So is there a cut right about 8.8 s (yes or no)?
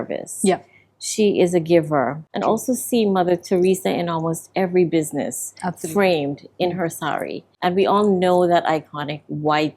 no